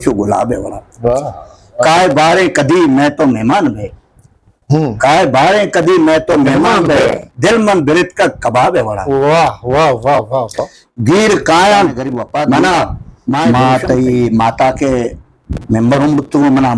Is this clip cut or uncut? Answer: cut